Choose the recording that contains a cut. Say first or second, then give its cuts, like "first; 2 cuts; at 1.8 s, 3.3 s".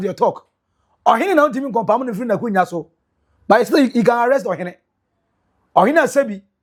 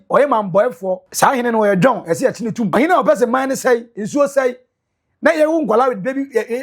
second; 2 cuts; at 1.1 s, 2.7 s